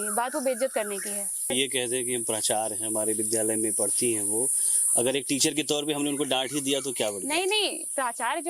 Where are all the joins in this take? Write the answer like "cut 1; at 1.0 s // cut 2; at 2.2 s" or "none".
cut 1; at 1.5 s